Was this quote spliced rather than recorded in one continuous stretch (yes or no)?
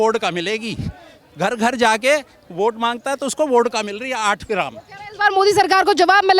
no